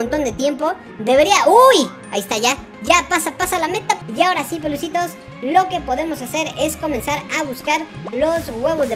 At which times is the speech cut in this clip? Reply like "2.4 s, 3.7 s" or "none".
4.0 s

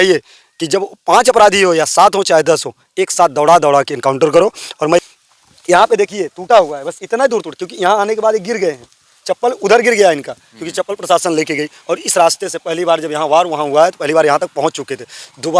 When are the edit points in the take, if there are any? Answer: 5.0 s

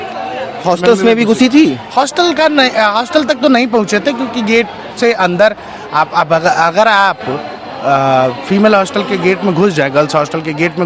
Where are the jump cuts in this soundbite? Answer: none

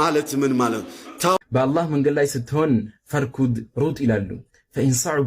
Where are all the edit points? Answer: 1.4 s

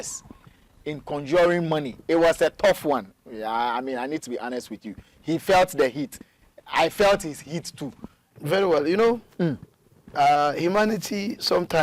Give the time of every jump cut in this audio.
8.1 s

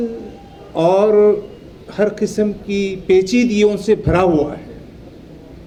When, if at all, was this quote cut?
none

